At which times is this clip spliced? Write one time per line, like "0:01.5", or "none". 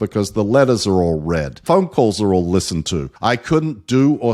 0:01.5
0:03.0